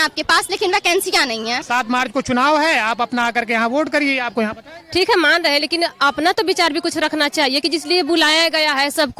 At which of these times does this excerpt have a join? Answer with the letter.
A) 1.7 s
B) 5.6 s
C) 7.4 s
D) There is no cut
A